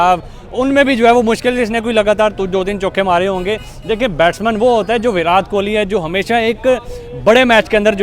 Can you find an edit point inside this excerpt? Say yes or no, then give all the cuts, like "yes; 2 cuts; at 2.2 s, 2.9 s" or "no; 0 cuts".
no; 0 cuts